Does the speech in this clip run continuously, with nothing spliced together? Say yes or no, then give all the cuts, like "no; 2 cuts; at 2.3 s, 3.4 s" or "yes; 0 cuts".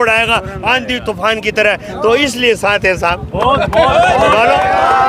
yes; 0 cuts